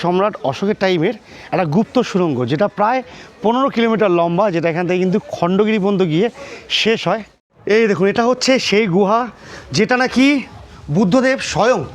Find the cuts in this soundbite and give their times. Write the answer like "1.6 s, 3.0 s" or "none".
7.5 s